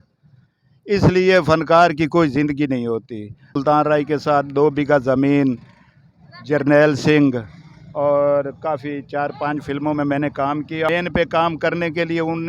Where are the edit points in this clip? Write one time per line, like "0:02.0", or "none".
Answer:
0:03.6
0:10.9